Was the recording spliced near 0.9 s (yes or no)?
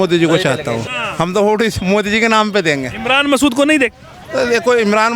yes